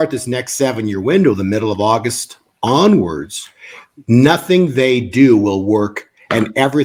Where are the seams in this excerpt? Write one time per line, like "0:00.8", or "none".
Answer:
none

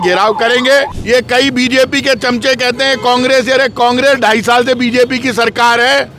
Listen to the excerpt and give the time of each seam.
0:01.0

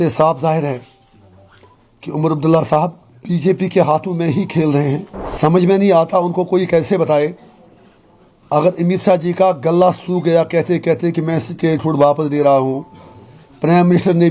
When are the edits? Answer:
0:03.1
0:05.2

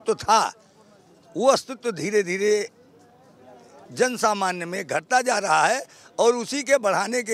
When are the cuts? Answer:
none

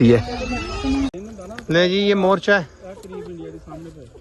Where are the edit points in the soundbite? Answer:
0:01.1

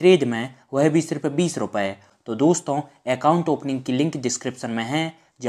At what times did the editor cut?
0:02.1

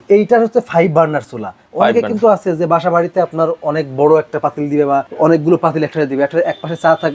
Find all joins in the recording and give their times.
0:05.1

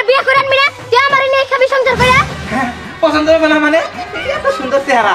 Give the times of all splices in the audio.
0:02.3

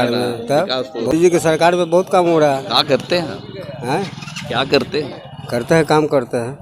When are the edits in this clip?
0:01.1

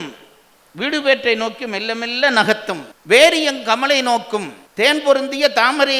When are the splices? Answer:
0:02.9
0:04.6

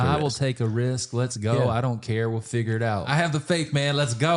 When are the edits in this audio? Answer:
0:03.1

